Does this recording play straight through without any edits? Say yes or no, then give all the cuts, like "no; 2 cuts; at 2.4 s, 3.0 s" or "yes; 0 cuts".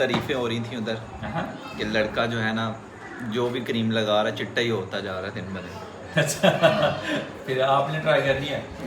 yes; 0 cuts